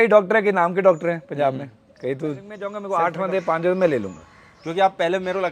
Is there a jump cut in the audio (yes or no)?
yes